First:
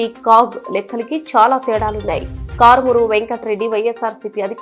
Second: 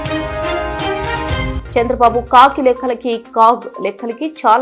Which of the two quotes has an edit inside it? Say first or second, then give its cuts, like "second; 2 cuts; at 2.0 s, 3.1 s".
second; 1 cut; at 1.6 s